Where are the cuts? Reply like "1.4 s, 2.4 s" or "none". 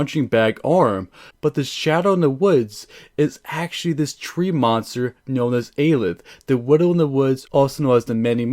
7.4 s